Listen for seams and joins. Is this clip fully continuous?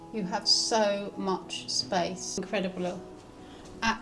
no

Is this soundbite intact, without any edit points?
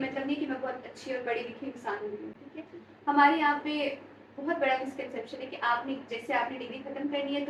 yes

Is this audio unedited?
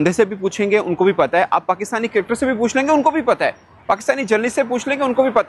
yes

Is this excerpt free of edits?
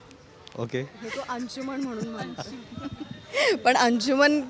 yes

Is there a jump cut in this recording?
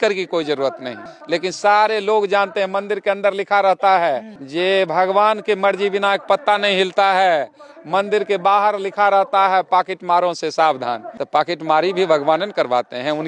no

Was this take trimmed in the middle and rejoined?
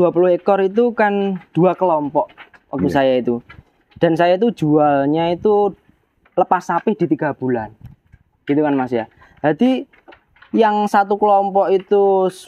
no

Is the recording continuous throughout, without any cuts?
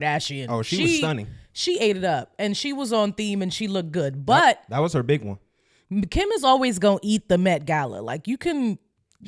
yes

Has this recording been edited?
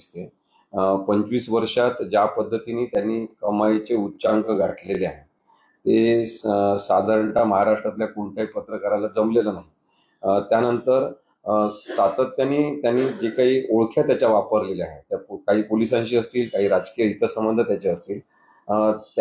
no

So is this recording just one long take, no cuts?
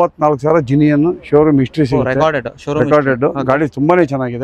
yes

